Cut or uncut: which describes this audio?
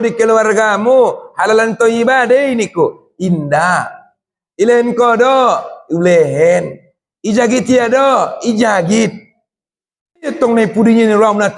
cut